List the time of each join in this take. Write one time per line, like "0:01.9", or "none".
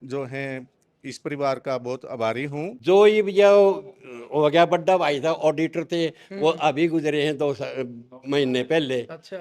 0:02.7